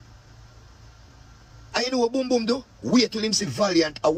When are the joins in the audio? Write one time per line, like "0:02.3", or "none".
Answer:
none